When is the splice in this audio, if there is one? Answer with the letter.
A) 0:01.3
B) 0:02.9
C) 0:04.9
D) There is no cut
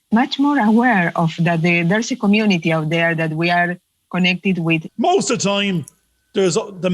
C